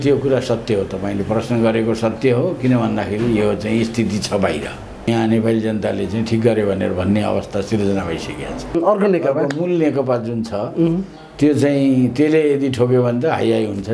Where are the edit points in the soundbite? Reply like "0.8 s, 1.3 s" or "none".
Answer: 5.1 s, 8.8 s